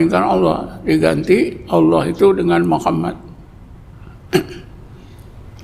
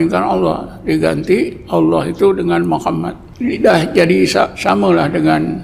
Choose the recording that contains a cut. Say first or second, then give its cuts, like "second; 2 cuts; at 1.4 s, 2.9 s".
second; 2 cuts; at 3.2 s, 4.6 s